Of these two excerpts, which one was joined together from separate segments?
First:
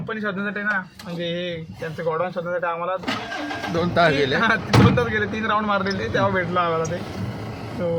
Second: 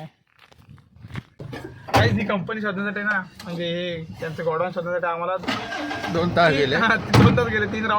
second; 1 cut; at 1.5 s

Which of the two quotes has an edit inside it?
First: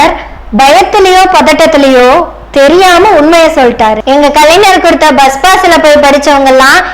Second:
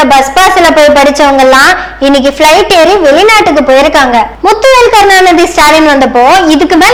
first; 1 cut; at 4.0 s

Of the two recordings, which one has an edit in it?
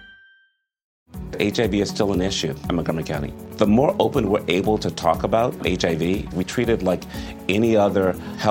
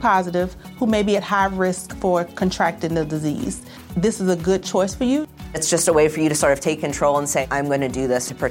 first; 1 cut; at 1.0 s

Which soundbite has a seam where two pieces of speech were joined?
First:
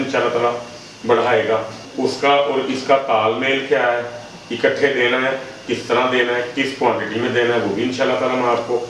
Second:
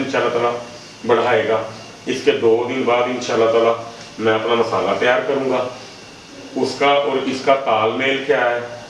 first; 1 cut; at 1.8 s

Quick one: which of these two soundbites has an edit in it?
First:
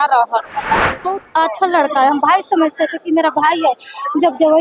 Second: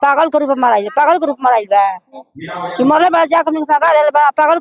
first; 1 cut; at 1.2 s

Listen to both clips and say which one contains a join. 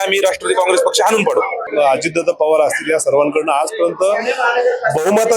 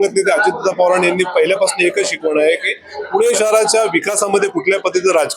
first; 1 cut; at 1.7 s

